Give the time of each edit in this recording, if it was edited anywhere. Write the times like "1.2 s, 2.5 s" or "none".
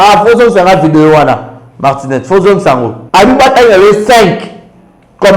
3.0 s